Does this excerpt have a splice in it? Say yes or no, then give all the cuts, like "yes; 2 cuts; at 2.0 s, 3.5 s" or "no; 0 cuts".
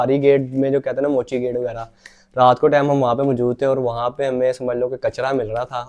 no; 0 cuts